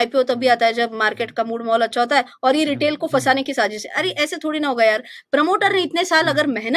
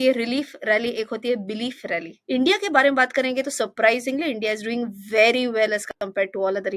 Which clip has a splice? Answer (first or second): second